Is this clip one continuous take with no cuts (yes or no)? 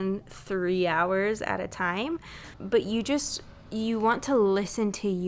yes